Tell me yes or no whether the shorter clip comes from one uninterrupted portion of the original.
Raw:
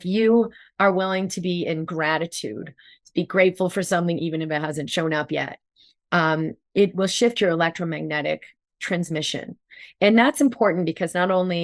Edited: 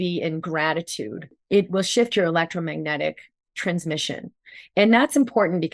no